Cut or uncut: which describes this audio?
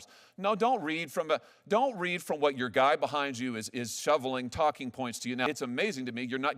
cut